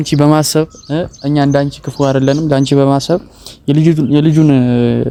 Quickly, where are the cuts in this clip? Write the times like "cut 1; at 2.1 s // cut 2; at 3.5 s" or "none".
none